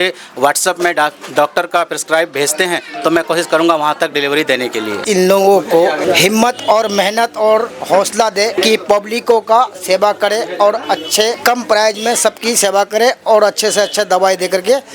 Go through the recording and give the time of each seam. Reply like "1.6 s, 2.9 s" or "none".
5.0 s, 6.0 s, 8.6 s, 11.4 s